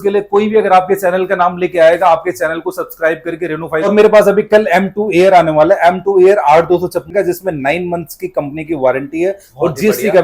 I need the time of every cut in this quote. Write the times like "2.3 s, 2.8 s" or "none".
3.9 s, 7.1 s